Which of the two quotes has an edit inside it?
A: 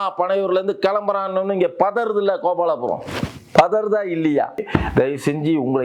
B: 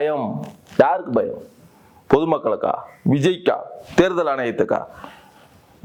A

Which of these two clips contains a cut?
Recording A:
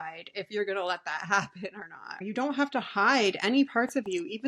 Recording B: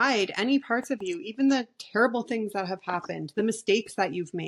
A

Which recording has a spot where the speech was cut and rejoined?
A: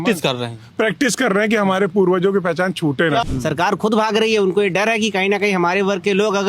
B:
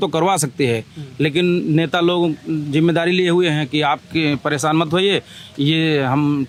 A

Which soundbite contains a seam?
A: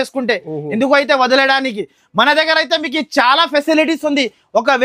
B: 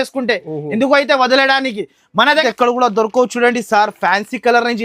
B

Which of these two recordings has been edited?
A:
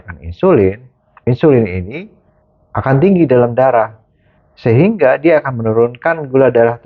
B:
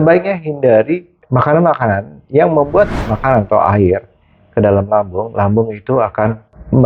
B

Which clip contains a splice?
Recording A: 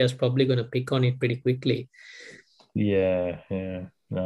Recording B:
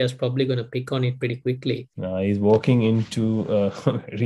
B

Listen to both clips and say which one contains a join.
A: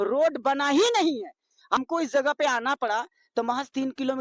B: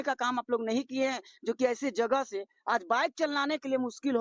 A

